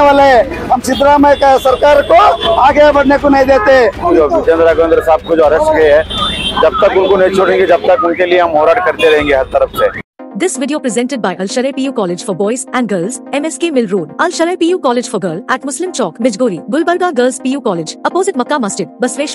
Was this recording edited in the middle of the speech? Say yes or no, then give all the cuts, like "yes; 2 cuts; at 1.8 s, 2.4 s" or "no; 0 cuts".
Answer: yes; 2 cuts; at 4.0 s, 10.2 s